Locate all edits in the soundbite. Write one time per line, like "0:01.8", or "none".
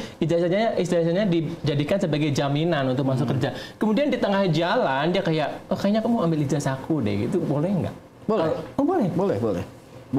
none

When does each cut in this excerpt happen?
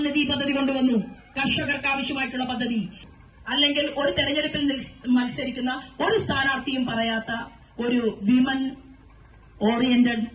0:03.0

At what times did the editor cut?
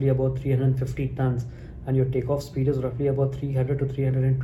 none

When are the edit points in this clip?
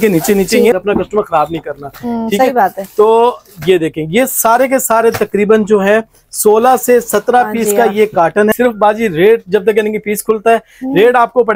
0:00.8
0:08.5

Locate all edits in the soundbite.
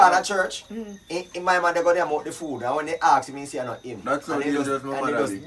none

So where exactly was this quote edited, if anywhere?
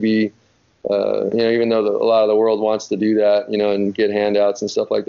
none

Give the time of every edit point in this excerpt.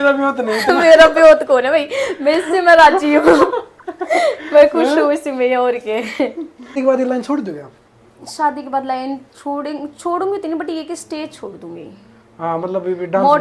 0:06.7

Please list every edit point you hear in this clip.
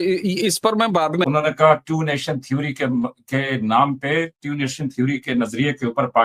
0:01.2

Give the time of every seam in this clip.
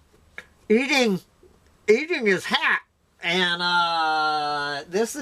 0:03.9

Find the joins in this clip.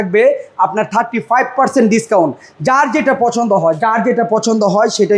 none

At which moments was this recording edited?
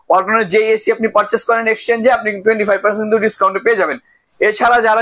none

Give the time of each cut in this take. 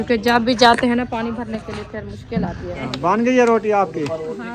0:02.8

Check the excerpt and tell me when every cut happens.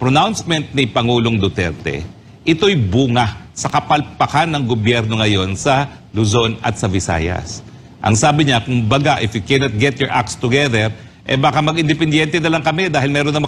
none

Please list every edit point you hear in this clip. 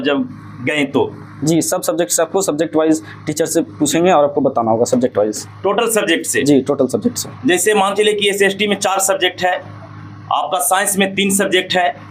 none

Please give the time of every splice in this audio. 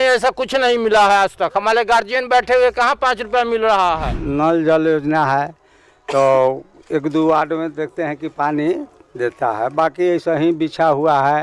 0:04.2

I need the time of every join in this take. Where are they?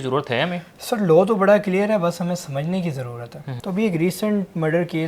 0:03.5

